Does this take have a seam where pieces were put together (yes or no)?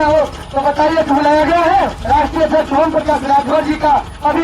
yes